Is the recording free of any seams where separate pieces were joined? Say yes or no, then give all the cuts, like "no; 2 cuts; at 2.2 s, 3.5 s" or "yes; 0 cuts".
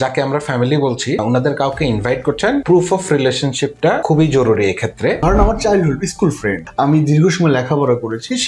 no; 5 cuts; at 1.2 s, 2.6 s, 4.0 s, 5.2 s, 6.6 s